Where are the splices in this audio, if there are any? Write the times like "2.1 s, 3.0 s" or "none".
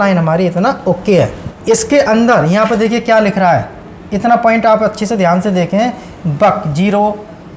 1.5 s